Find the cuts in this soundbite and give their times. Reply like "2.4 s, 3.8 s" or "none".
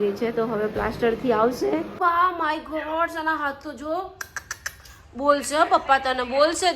1.9 s